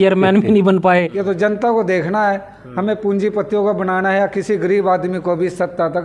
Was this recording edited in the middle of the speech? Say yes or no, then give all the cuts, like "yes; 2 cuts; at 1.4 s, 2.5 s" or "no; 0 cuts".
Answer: yes; 1 cut; at 1.1 s